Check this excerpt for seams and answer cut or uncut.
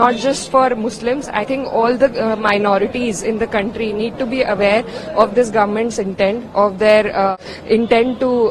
cut